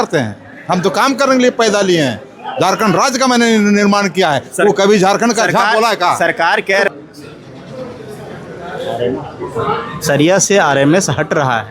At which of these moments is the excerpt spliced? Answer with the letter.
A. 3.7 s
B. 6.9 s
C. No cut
B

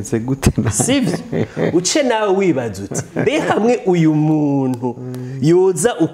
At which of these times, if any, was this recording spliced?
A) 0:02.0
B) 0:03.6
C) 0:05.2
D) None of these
D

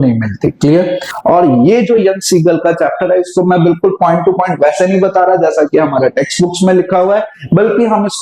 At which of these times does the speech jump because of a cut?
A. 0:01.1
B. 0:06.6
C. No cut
A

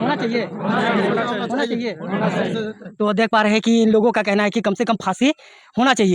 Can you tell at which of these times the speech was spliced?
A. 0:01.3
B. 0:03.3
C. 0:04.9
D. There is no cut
D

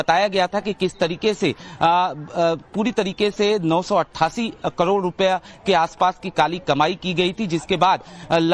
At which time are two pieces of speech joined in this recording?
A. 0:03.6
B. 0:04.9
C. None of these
B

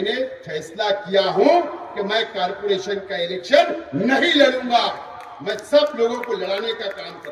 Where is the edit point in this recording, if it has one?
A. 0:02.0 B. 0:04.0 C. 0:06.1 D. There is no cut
D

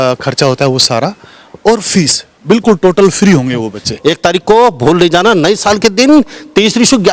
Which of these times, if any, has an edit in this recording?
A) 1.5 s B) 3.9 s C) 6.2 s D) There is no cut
B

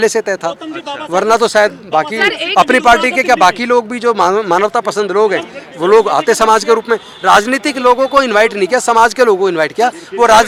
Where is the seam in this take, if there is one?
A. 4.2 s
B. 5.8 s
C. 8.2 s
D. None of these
D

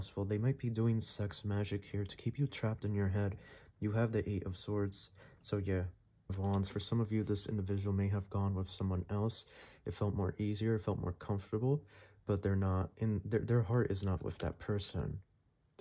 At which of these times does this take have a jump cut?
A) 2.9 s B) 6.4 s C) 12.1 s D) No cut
B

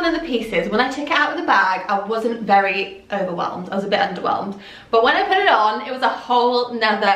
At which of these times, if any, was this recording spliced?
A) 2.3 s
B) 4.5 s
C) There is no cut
C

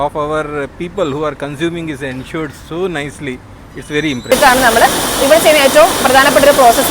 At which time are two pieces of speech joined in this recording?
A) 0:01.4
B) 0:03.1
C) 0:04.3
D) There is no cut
C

